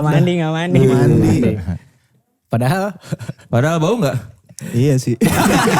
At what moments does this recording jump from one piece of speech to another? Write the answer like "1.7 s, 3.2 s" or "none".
none